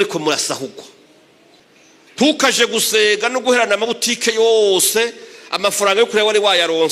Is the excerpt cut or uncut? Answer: cut